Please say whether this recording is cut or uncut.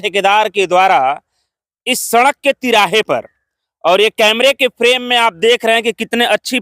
uncut